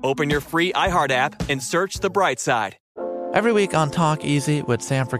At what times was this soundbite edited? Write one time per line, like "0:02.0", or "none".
0:02.8